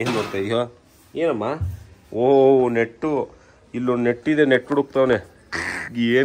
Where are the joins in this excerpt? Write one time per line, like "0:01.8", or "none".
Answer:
none